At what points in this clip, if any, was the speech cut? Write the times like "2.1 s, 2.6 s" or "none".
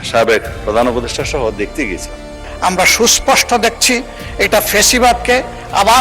2.4 s